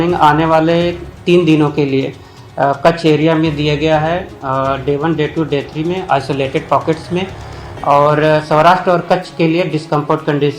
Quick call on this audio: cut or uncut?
cut